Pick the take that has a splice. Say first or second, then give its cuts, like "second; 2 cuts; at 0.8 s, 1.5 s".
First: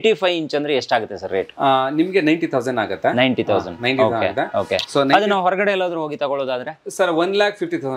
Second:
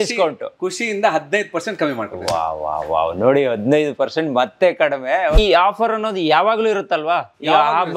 second; 1 cut; at 5.4 s